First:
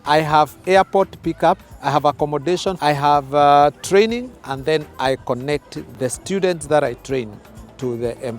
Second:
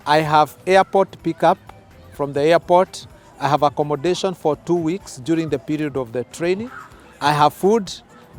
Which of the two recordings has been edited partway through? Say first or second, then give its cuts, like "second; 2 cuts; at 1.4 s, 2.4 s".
first; 3 cuts; at 1.7 s, 2.8 s, 5.8 s